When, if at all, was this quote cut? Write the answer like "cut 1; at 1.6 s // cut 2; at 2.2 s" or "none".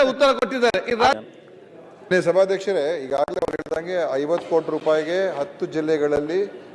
cut 1; at 1.1 s

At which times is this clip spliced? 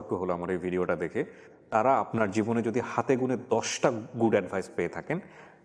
none

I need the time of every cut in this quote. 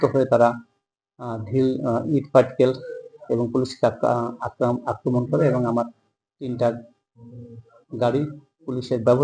none

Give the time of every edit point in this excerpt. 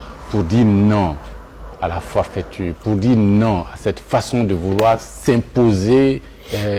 none

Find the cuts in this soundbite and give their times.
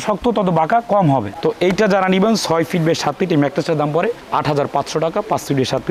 cut 1; at 1.3 s

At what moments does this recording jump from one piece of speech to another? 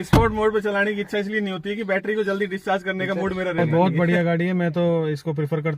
cut 1; at 3.6 s

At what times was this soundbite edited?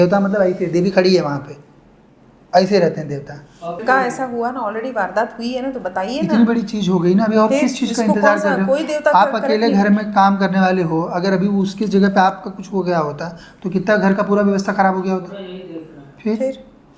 cut 1; at 3.8 s

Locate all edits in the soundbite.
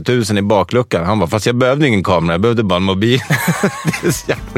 none

